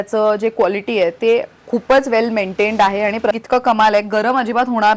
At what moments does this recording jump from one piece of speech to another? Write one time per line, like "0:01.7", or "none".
0:03.4